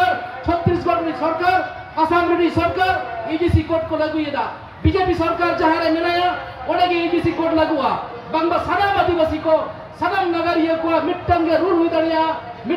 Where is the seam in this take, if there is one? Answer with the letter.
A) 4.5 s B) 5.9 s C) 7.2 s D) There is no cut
D